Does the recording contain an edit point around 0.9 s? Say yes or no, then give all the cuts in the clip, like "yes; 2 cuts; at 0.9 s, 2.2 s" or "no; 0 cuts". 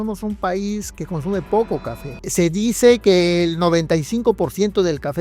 yes; 2 cuts; at 0.9 s, 2.2 s